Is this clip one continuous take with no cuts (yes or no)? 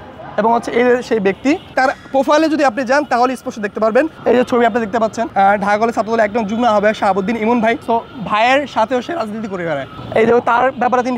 no